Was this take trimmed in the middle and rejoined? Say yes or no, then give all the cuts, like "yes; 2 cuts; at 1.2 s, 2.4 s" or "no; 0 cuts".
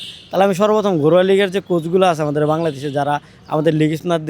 no; 0 cuts